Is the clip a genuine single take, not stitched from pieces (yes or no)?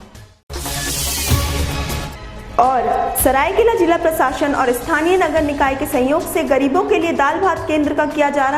yes